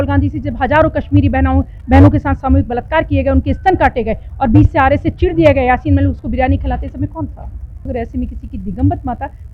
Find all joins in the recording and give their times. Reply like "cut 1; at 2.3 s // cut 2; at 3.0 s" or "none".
cut 1; at 7.8 s